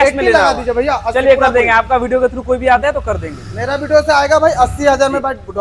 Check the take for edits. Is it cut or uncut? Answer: uncut